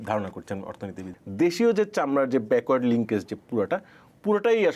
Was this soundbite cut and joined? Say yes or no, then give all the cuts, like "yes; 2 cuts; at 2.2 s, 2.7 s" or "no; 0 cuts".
yes; 1 cut; at 1.0 s